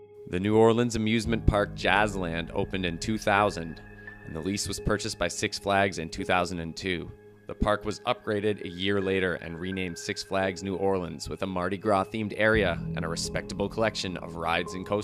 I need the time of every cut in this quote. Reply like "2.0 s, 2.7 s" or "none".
9.7 s